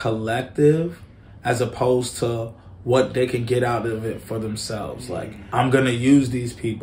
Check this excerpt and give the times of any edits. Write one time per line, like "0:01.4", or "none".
0:05.4